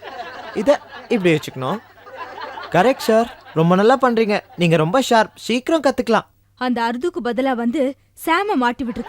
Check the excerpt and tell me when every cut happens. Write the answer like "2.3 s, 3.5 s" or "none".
6.4 s